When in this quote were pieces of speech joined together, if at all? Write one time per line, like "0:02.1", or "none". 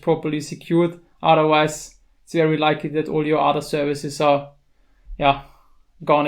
none